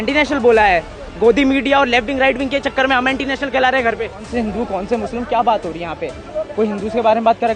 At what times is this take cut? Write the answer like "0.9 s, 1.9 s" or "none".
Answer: 4.3 s